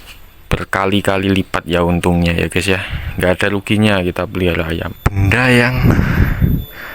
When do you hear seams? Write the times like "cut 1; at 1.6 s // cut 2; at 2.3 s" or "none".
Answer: cut 1; at 5.0 s